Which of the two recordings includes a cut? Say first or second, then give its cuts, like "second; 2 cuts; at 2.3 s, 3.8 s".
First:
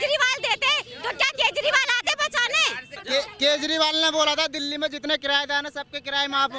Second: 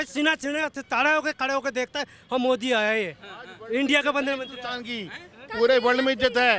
first; 1 cut; at 2.9 s